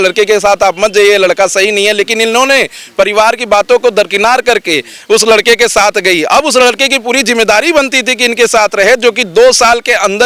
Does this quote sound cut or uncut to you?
uncut